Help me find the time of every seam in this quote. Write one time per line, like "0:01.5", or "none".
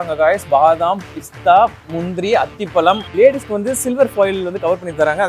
0:03.1